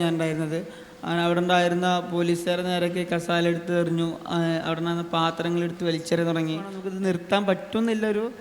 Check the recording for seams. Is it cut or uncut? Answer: cut